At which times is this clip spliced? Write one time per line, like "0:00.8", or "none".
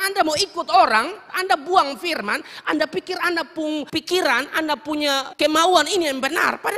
0:01.3
0:03.9
0:05.3